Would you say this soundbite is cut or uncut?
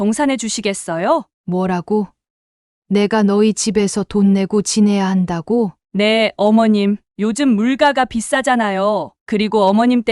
cut